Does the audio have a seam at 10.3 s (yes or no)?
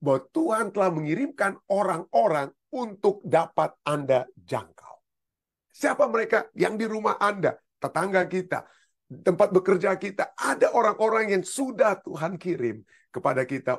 no